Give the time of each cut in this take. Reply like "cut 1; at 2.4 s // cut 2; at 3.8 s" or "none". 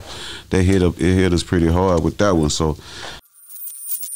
cut 1; at 3.1 s

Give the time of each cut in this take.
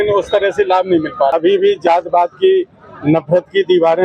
cut 1; at 1.3 s

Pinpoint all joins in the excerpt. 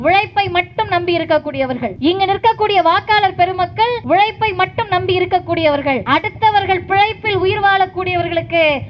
cut 1; at 1.9 s // cut 2; at 4.0 s // cut 3; at 6.0 s

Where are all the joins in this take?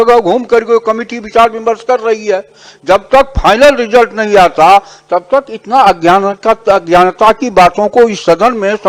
none

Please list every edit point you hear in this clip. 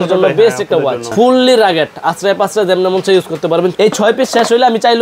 cut 1; at 1.1 s // cut 2; at 3.7 s

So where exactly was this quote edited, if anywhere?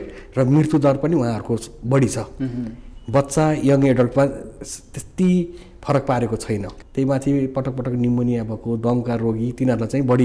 cut 1; at 6.7 s

